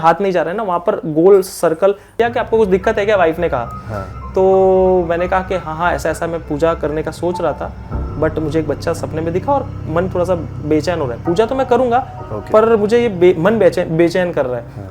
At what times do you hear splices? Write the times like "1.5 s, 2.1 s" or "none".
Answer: 2.2 s